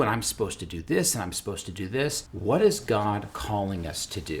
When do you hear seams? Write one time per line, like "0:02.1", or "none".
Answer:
0:02.3
0:03.3